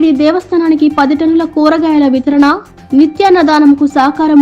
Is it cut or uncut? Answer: uncut